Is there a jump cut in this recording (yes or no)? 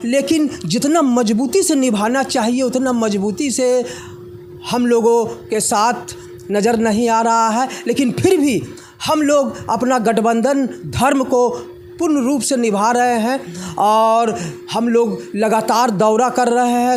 no